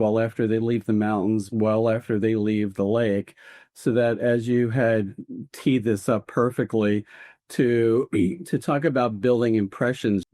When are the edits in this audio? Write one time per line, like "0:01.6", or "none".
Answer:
none

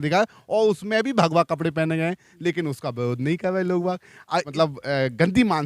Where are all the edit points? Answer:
0:04.5

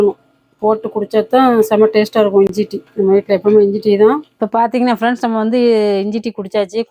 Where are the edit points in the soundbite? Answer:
none

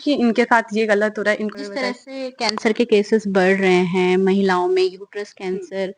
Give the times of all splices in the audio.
0:01.5

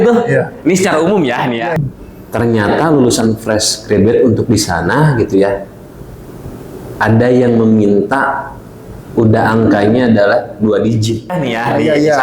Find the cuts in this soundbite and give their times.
0:01.8
0:11.3

